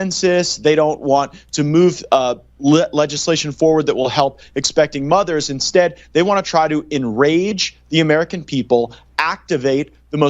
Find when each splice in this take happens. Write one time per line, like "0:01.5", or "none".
none